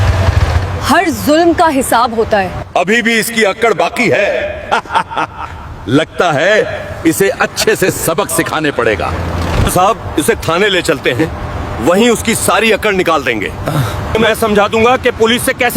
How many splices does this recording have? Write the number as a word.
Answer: three